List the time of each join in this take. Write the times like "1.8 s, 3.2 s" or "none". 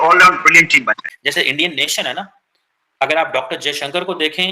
1.1 s